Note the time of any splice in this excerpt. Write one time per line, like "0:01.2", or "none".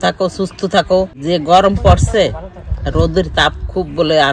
0:01.2